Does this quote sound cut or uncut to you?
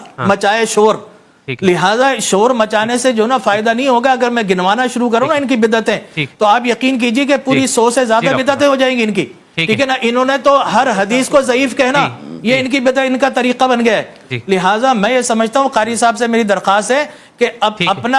uncut